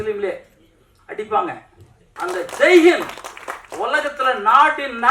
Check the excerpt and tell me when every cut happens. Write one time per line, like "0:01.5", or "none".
0:02.0